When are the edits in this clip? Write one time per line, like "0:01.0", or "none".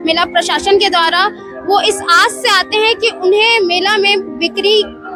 none